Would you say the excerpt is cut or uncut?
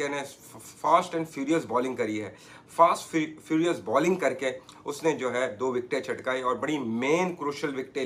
uncut